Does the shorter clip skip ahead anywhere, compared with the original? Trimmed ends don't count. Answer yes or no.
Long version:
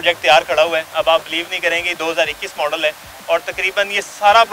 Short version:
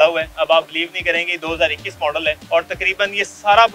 yes